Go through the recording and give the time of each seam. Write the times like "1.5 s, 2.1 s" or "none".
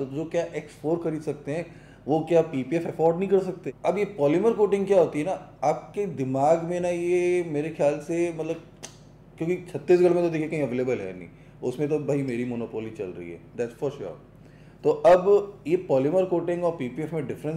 3.6 s